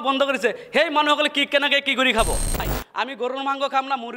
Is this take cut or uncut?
cut